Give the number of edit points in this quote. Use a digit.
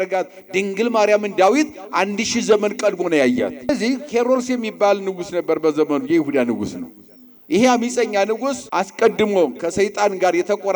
2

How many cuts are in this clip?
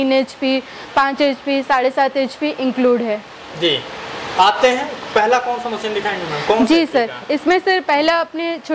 0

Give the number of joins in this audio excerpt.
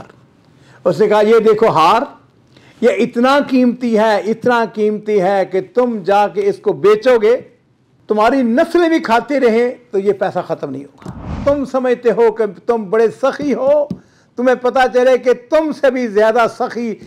1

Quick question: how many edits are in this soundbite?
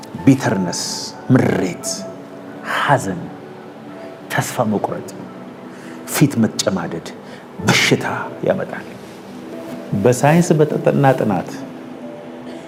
0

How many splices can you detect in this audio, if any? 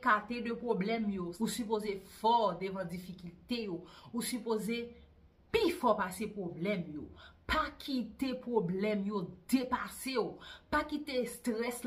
1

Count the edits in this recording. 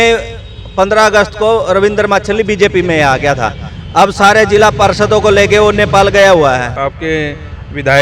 1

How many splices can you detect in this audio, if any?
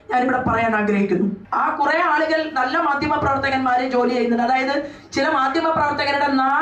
1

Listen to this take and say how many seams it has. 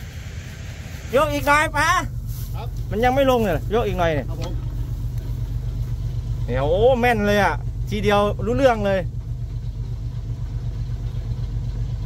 1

